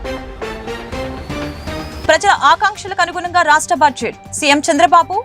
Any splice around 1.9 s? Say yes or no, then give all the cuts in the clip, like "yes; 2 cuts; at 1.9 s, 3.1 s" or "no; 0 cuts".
yes; 1 cut; at 1.9 s